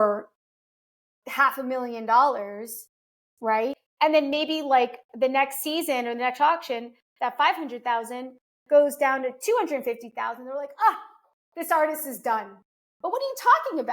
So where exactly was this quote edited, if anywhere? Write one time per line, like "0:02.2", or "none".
0:03.8